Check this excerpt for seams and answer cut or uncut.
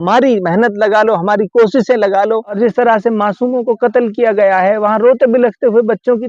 cut